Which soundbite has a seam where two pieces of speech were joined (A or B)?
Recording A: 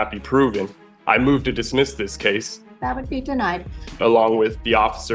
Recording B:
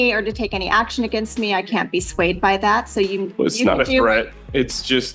A